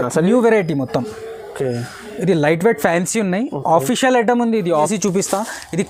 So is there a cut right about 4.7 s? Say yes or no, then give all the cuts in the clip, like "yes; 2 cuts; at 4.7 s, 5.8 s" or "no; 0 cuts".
yes; 1 cut; at 4.7 s